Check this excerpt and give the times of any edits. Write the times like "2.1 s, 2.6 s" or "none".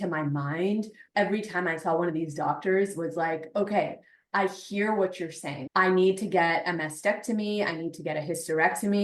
1.0 s, 5.5 s